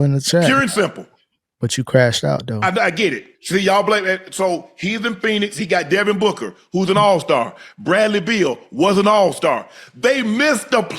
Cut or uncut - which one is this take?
cut